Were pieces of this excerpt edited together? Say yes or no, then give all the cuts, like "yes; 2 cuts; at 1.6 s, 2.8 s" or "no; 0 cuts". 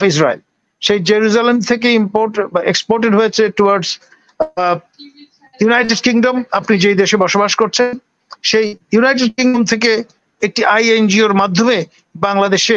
no; 0 cuts